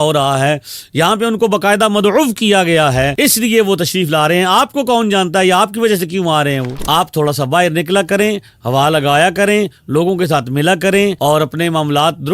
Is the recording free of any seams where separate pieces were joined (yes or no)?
no